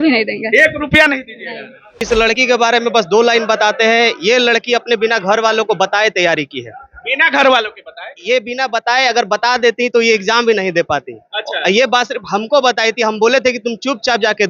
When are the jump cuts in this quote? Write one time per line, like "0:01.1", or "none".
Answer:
0:01.9